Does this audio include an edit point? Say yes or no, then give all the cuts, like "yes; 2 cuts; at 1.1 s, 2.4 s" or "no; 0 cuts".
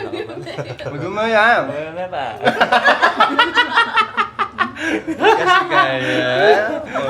no; 0 cuts